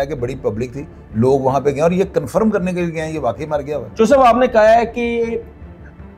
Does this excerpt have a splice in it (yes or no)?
no